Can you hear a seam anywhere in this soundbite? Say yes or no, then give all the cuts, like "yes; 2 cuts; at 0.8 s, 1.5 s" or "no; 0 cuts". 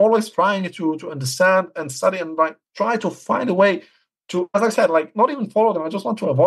no; 0 cuts